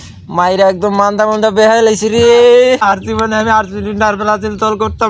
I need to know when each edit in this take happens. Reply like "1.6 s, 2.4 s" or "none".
2.8 s